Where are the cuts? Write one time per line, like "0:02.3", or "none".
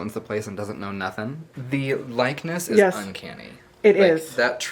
0:01.5